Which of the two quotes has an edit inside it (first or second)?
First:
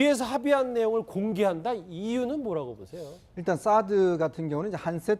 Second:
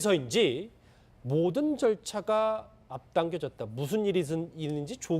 second